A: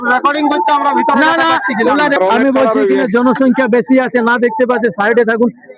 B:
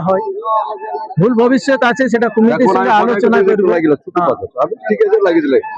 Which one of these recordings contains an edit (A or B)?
A